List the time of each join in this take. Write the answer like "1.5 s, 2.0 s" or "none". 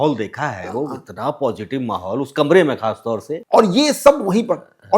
3.3 s